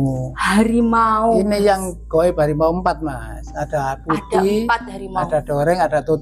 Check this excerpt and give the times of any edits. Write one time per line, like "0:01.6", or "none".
none